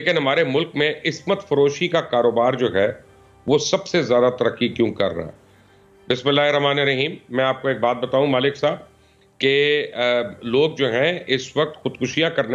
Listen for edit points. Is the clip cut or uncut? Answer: uncut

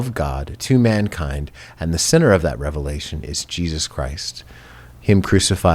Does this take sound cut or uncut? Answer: uncut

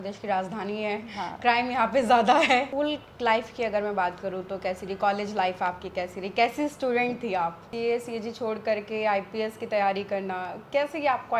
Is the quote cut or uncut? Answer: cut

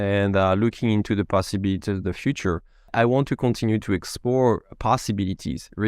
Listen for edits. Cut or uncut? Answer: cut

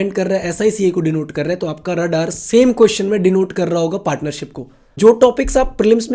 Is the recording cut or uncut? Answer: cut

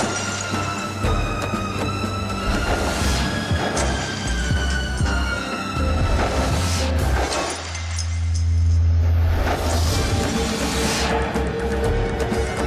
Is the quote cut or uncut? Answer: uncut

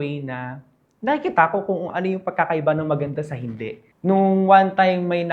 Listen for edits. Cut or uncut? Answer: cut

